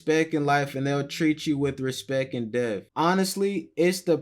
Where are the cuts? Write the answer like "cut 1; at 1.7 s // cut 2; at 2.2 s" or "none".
cut 1; at 2.8 s